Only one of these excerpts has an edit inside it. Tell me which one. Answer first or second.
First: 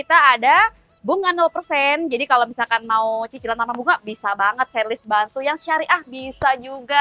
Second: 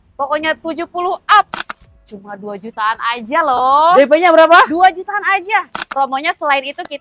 second